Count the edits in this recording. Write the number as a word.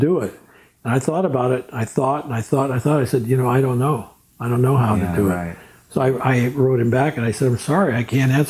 zero